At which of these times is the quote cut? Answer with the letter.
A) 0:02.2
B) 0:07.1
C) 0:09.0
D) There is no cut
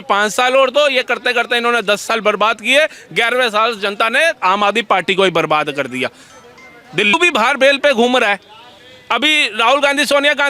B